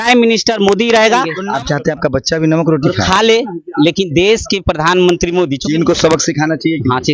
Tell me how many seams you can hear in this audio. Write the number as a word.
two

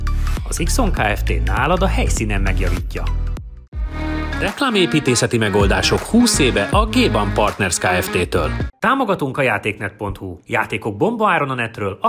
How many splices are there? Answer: two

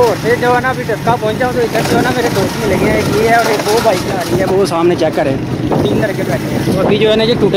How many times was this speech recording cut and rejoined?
zero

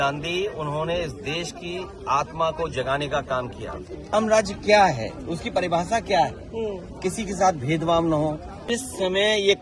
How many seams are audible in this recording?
two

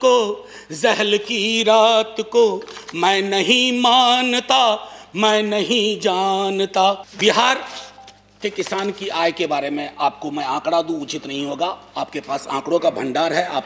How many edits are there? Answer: one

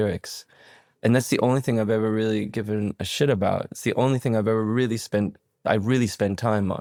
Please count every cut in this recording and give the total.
zero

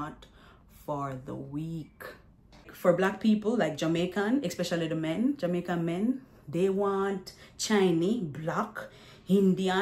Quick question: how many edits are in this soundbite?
one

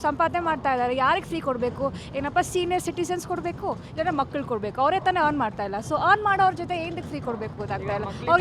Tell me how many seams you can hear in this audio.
zero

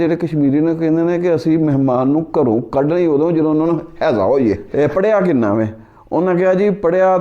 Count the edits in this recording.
one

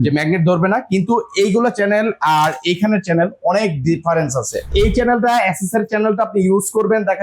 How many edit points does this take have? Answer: one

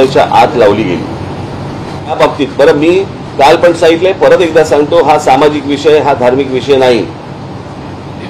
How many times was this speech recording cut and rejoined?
one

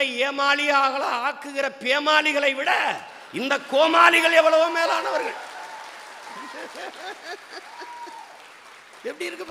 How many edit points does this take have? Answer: zero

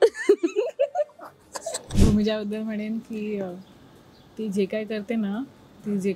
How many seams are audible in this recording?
one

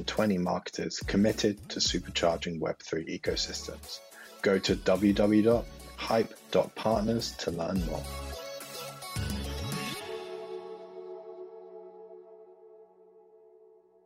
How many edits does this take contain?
one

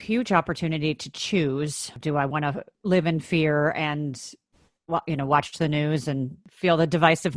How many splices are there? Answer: three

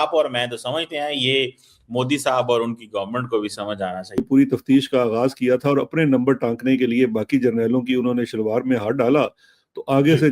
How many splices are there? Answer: one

